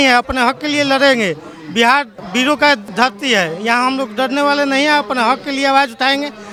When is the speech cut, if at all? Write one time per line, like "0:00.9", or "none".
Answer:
none